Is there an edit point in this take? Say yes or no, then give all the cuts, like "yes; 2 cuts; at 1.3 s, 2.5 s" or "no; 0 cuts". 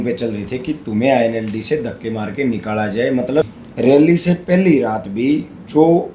yes; 1 cut; at 3.4 s